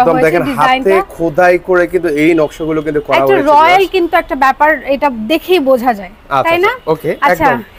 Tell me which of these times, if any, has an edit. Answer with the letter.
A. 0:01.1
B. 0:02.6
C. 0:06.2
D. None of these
D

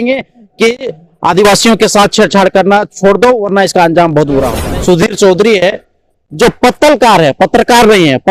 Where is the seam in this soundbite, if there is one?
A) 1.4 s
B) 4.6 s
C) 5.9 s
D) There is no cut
B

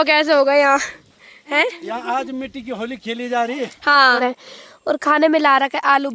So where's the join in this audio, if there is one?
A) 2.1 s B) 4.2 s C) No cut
B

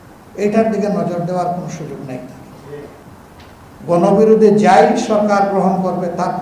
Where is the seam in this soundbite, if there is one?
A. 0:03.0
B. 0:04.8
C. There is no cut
A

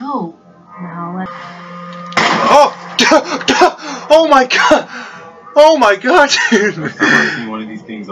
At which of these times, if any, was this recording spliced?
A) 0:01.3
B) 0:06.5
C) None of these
A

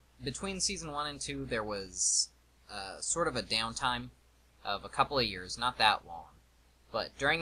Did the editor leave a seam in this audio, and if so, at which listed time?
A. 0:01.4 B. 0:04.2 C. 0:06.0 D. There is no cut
B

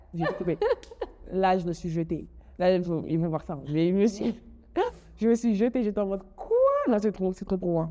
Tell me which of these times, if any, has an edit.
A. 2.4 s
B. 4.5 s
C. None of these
C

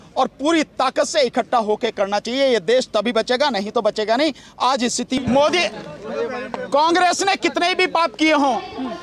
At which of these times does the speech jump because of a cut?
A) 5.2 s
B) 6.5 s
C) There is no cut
A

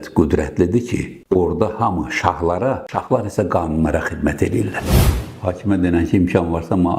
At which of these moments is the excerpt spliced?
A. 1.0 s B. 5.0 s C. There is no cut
B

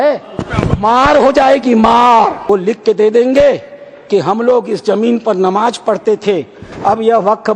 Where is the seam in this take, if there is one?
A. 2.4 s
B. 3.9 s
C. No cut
A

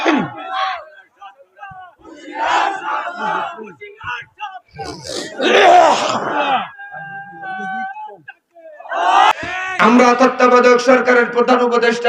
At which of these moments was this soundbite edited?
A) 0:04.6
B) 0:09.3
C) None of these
B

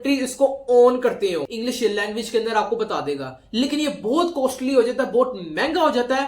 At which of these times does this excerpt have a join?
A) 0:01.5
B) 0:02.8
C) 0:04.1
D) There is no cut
A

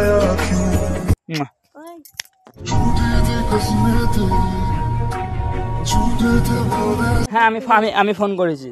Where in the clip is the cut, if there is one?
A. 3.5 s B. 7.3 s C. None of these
B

